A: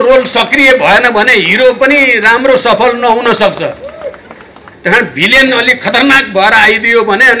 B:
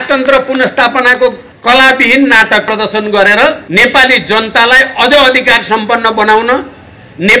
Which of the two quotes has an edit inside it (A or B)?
B